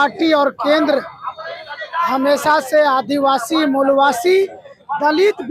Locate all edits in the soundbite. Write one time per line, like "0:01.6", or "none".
none